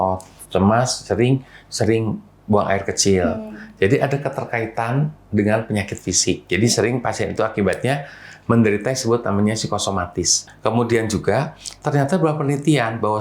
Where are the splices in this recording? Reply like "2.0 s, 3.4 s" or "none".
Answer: 10.4 s